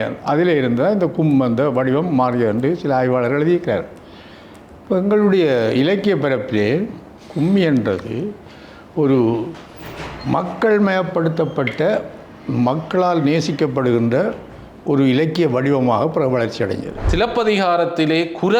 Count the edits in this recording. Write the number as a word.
one